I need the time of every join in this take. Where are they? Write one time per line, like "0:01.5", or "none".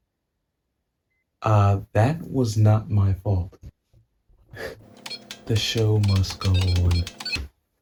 none

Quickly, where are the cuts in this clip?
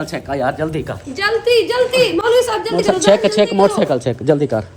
none

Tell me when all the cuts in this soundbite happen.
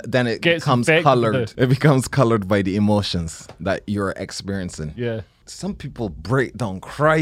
0:01.5
0:05.4

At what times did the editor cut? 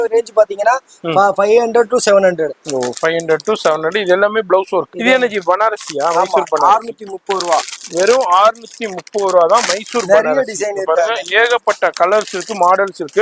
0:04.9

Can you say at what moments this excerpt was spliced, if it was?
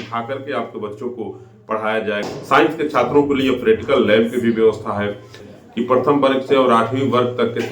0:02.2
0:05.4

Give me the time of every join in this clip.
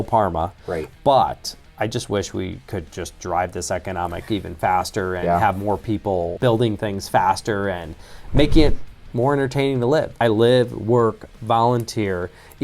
0:06.3
0:10.2

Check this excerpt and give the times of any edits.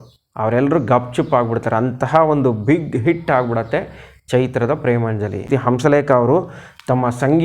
0:05.5

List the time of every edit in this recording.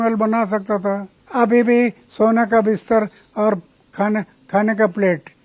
0:01.2

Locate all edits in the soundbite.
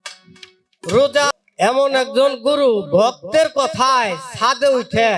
0:01.3

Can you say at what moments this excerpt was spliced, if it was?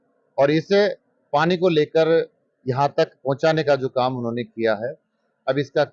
none

